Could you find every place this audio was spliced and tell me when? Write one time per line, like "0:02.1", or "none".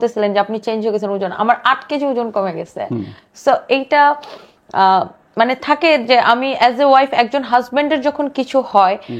none

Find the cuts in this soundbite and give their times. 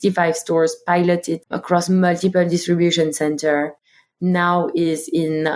0:01.4

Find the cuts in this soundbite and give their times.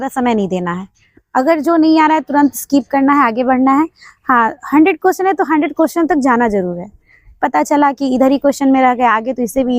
none

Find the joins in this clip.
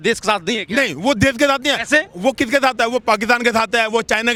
none

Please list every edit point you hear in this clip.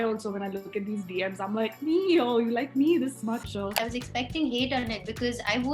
0:03.8

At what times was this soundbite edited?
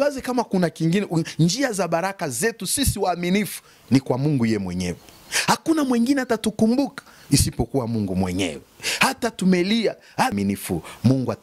0:10.3

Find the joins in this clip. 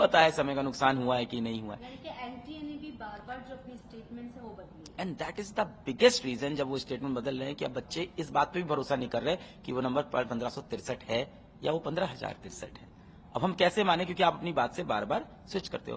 none

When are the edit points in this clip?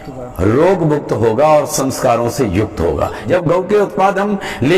0:03.2

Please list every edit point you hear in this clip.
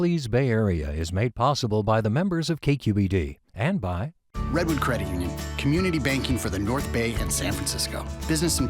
0:04.2

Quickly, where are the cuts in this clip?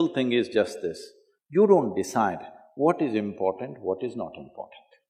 none

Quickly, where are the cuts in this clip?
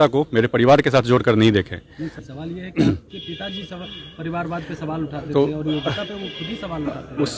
0:02.3

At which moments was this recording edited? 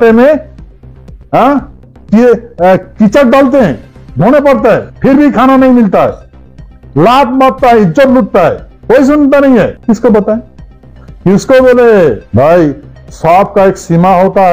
0:04.9
0:08.7
0:09.8
0:12.2

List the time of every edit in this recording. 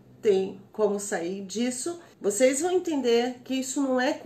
0:02.1

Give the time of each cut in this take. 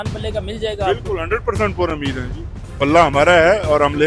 none

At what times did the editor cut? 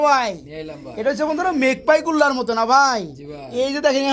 none

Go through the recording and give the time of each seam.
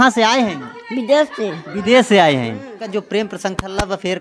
0:02.8

